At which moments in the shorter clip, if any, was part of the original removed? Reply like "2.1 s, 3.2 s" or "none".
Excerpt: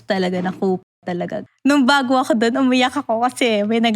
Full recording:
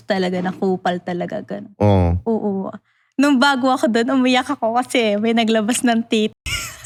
1.4 s